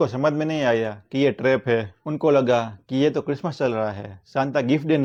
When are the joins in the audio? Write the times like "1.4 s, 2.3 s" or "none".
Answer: none